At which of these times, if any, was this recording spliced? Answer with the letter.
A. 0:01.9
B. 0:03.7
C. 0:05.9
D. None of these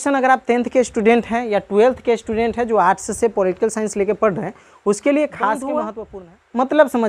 C